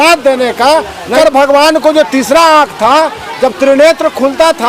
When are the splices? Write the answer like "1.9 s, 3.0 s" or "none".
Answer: 1.1 s